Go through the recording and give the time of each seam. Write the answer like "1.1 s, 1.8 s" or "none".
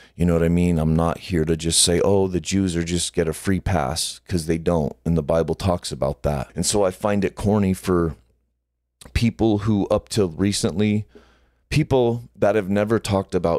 6.5 s